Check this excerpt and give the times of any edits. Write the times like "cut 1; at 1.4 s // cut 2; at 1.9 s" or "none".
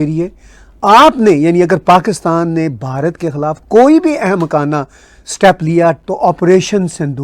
cut 1; at 6.0 s